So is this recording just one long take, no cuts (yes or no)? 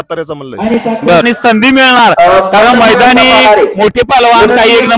no